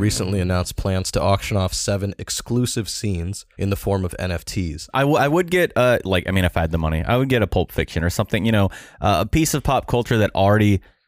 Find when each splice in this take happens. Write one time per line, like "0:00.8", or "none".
0:03.4
0:04.9